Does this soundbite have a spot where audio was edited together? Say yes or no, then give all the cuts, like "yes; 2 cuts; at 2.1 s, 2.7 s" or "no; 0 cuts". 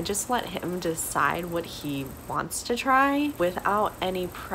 yes; 1 cut; at 3.4 s